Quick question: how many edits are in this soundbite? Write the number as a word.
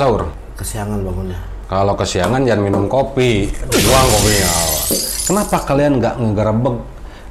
one